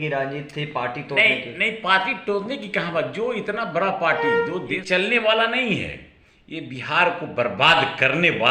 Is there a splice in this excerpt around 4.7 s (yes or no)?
yes